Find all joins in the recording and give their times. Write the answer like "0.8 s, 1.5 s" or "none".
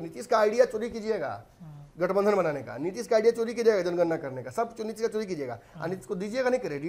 none